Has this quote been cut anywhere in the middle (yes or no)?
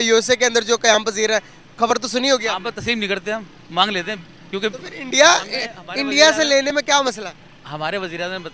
no